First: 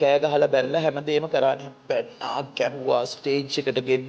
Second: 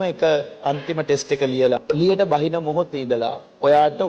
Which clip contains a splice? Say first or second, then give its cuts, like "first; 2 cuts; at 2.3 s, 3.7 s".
second; 1 cut; at 1.8 s